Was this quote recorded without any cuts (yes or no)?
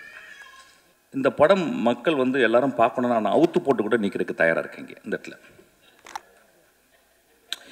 no